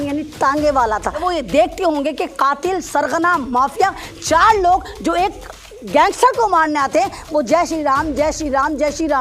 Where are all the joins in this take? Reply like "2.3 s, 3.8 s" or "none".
1.2 s